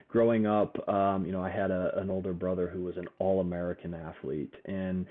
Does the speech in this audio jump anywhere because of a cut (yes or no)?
no